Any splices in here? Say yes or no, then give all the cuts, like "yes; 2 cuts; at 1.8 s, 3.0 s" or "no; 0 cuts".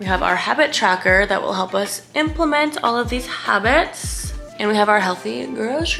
no; 0 cuts